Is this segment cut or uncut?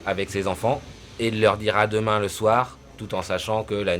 cut